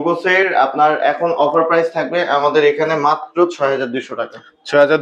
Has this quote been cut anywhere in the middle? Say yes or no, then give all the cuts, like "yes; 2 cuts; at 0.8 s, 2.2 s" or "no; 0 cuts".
no; 0 cuts